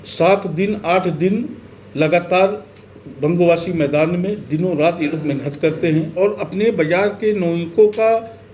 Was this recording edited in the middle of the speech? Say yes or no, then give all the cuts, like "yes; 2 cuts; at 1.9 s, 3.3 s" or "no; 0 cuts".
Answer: yes; 1 cut; at 6.2 s